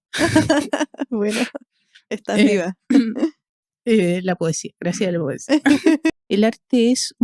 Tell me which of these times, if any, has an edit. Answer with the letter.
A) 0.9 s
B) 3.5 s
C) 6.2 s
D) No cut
C